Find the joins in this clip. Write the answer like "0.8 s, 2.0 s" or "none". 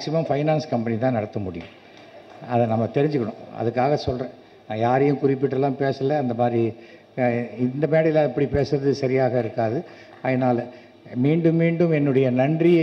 none